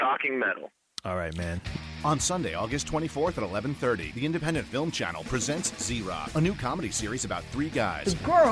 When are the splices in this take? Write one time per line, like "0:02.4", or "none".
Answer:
0:01.7